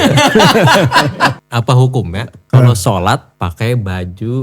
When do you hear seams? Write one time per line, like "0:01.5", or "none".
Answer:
0:01.4
0:03.3